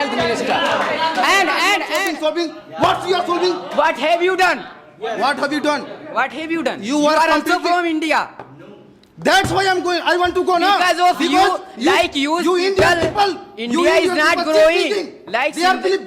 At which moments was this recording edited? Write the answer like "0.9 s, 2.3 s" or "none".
1.9 s